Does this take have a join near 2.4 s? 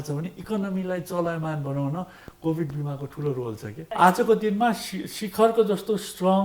no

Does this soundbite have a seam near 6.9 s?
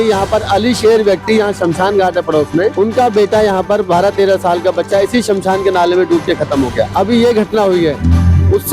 yes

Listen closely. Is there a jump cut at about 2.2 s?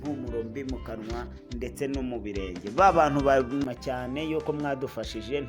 no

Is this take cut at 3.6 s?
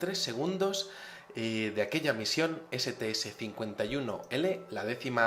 no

